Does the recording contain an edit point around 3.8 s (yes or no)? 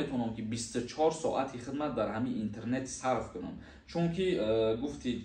no